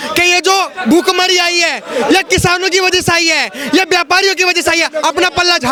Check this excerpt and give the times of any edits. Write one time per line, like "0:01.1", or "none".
none